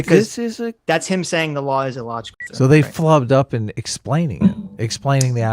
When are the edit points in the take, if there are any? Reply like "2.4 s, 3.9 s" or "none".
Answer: 2.4 s